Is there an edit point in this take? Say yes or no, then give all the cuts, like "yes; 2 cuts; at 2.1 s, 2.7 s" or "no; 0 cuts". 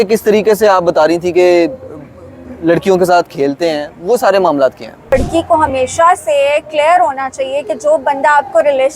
yes; 1 cut; at 5.1 s